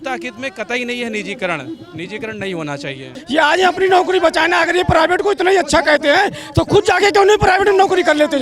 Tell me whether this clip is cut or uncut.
cut